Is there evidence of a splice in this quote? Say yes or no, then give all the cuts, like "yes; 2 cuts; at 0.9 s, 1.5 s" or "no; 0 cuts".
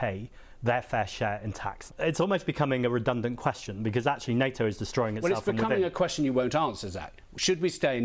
yes; 1 cut; at 1.9 s